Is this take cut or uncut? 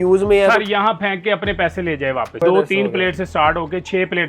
cut